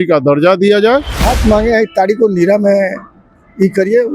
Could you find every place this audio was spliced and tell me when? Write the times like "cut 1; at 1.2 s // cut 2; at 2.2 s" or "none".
cut 1; at 1.1 s